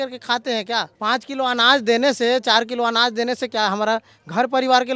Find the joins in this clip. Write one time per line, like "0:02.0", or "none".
0:00.9